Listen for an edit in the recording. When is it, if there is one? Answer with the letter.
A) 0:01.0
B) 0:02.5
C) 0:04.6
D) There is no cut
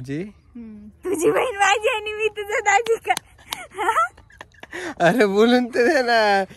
C